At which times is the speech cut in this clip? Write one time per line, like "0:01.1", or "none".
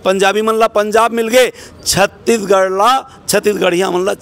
none